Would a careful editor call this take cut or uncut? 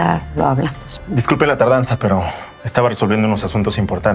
cut